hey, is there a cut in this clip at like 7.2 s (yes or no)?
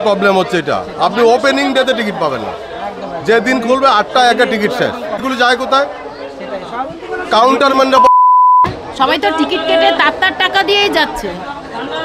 no